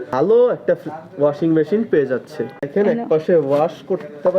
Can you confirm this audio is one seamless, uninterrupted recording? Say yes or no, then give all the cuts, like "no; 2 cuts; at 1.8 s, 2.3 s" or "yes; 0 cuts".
no; 1 cut; at 2.7 s